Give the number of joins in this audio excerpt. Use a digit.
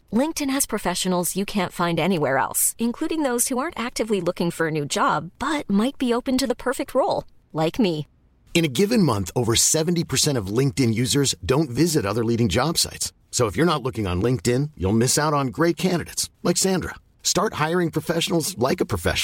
0